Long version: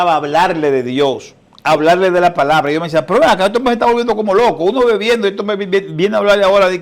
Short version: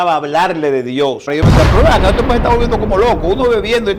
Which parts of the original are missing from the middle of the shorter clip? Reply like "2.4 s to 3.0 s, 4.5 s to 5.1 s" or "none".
1.3 s to 2.7 s